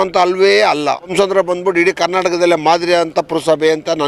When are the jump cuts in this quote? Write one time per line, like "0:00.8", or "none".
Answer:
0:01.1